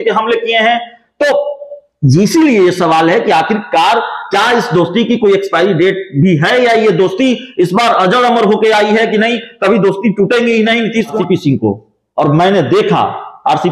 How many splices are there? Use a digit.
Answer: 1